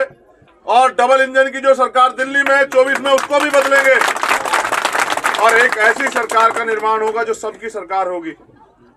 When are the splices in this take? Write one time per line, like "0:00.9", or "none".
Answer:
none